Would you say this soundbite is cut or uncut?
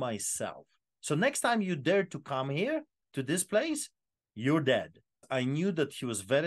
cut